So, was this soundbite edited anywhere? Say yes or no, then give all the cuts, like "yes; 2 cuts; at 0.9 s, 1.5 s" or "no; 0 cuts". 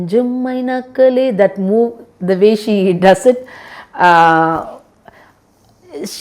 no; 0 cuts